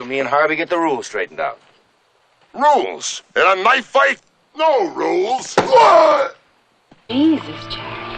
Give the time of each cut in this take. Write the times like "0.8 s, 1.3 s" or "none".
7.0 s